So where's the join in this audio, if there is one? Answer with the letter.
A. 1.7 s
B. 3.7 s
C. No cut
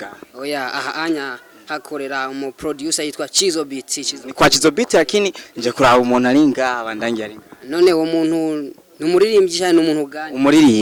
C